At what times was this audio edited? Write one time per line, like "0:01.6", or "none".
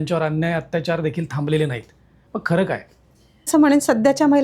0:03.5